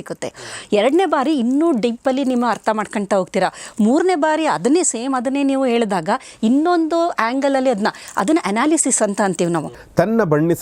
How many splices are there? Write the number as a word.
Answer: one